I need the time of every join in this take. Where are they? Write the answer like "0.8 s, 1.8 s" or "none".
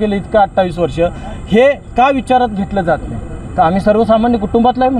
none